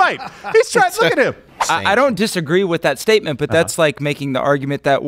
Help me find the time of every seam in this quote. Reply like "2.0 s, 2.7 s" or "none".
1.5 s